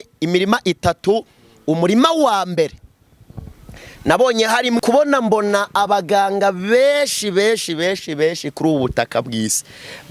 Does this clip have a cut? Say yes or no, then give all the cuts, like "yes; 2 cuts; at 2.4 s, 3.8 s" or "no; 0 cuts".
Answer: yes; 1 cut; at 4.8 s